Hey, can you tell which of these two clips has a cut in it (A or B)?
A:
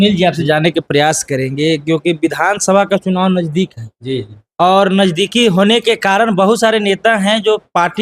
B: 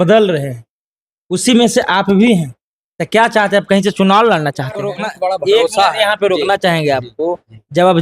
B